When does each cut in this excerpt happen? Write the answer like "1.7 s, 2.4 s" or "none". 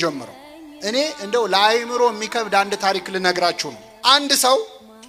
none

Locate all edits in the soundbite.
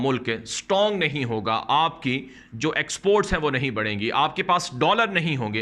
none

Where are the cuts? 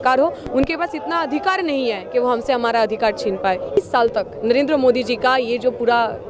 3.8 s

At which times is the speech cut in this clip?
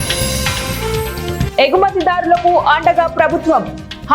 1.4 s

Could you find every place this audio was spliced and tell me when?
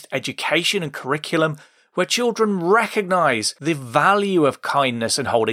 3.5 s

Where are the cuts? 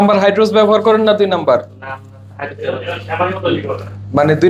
none

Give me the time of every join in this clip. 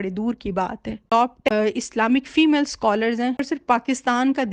1.0 s, 3.4 s

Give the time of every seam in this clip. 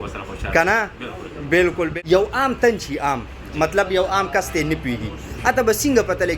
1.9 s

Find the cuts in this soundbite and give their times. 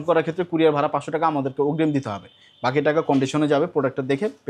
none

